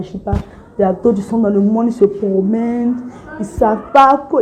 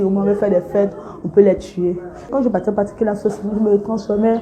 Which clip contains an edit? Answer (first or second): second